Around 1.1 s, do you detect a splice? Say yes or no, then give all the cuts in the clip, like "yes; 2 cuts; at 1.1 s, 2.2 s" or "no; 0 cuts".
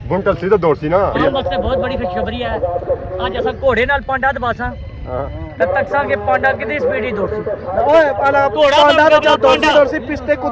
yes; 1 cut; at 1.1 s